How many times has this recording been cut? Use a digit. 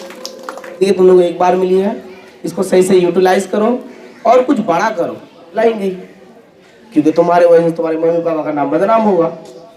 2